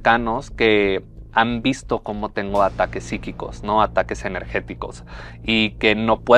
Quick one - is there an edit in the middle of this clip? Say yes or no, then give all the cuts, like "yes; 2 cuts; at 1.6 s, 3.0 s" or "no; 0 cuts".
no; 0 cuts